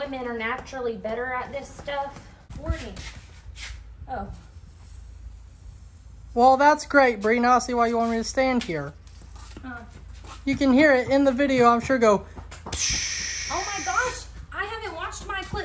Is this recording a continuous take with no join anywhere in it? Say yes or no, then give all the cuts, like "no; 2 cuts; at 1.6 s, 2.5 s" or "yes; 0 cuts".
no; 1 cut; at 2.5 s